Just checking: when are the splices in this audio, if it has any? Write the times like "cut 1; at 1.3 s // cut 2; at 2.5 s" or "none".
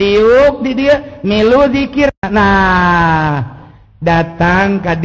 cut 1; at 2.2 s